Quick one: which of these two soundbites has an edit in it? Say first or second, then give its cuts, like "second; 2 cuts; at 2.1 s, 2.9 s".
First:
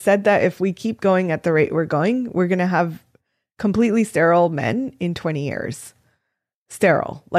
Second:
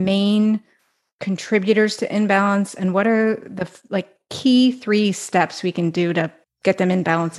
second; 1 cut; at 6.4 s